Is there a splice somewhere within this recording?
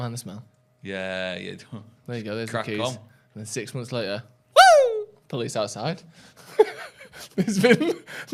no; 0 cuts

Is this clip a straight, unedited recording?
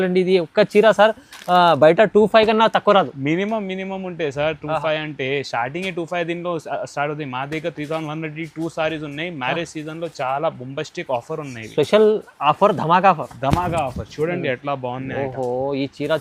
yes; 0 cuts

